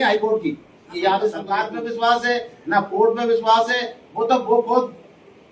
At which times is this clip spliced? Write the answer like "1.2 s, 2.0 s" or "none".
1.7 s